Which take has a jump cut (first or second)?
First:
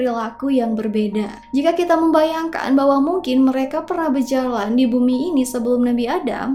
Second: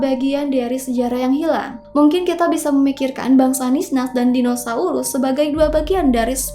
second